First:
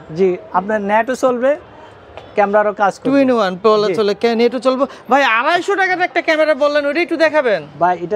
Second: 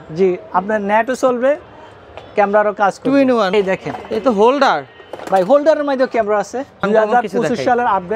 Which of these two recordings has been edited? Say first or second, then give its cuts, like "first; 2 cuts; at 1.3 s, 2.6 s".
second; 2 cuts; at 3.5 s, 6.8 s